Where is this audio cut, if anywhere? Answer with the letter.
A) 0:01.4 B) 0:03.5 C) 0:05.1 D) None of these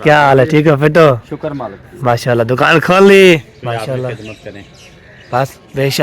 B